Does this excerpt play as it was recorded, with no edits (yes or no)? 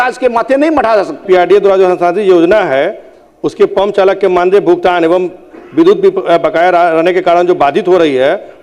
no